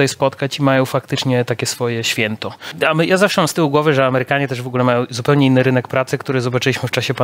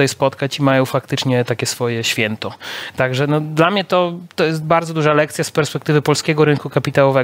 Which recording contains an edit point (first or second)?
first